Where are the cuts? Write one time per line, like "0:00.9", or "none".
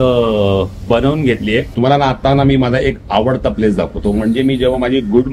0:01.7